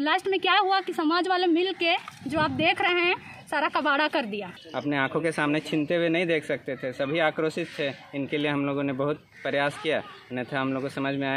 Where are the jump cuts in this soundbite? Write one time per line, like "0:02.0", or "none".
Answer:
0:04.5